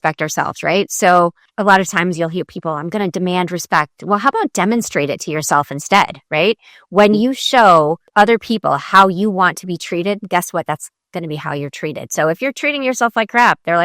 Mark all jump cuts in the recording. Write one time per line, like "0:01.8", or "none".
0:01.5
0:08.0

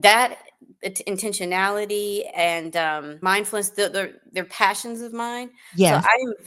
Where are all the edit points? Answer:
0:03.1

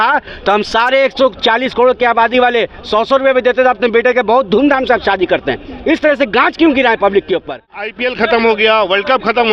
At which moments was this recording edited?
0:07.9

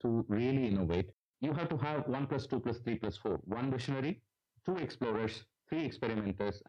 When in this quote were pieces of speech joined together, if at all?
0:01.1

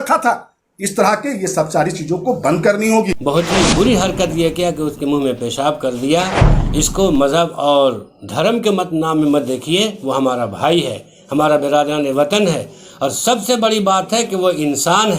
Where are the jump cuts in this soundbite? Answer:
0:03.1

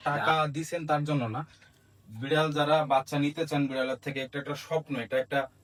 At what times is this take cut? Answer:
none

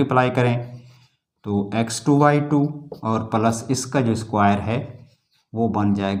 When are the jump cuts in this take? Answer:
none

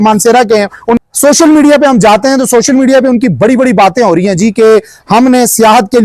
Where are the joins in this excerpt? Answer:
0:01.0

